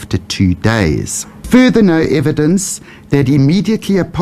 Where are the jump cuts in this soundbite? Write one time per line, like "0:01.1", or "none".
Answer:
0:01.4